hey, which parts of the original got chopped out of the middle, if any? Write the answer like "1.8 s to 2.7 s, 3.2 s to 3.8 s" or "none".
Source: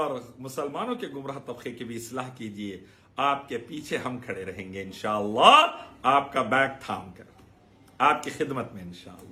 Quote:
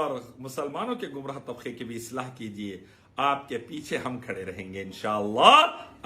none